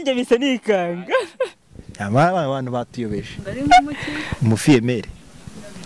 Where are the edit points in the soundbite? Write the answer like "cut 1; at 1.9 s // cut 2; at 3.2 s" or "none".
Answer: none